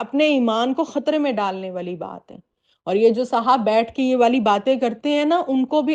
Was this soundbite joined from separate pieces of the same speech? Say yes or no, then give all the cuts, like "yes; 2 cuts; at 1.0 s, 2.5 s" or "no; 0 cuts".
no; 0 cuts